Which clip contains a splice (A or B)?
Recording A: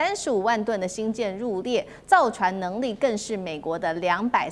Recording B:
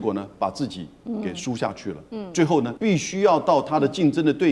B